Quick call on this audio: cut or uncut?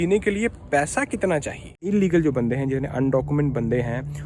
cut